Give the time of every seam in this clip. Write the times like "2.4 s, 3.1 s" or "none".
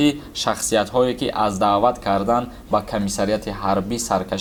none